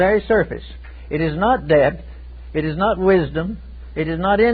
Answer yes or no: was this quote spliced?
yes